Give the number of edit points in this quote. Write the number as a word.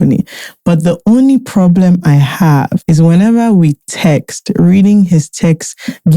one